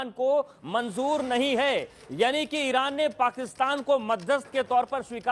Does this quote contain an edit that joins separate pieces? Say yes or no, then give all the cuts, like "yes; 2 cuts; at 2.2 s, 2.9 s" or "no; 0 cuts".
no; 0 cuts